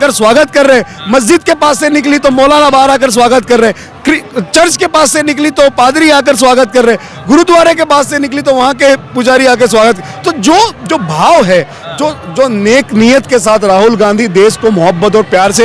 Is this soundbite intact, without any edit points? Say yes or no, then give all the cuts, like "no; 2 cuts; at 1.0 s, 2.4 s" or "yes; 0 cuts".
yes; 0 cuts